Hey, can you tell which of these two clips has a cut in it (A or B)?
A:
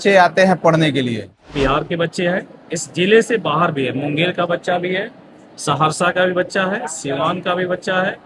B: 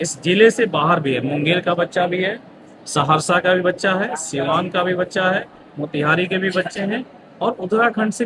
A